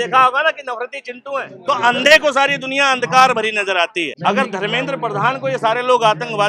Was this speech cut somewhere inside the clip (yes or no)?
yes